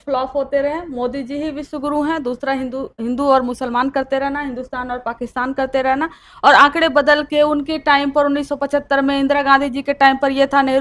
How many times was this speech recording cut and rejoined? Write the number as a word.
zero